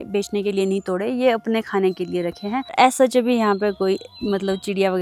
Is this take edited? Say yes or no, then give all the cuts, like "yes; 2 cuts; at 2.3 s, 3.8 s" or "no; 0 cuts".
no; 0 cuts